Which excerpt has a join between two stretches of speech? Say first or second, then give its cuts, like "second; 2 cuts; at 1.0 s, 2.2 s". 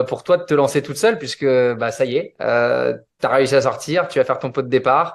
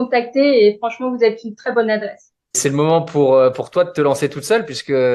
second; 1 cut; at 2.6 s